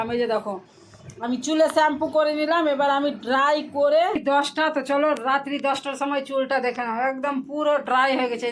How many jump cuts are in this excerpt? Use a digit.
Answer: 1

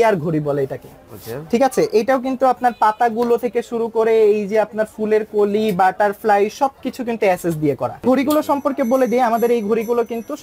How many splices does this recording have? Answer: 1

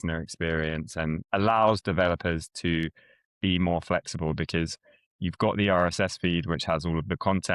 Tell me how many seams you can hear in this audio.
1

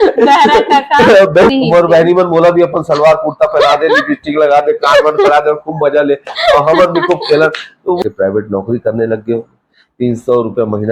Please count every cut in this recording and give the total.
2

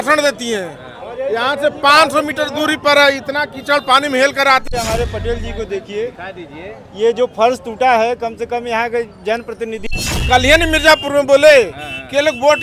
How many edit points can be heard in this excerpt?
2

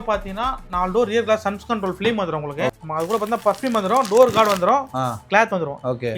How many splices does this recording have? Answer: 1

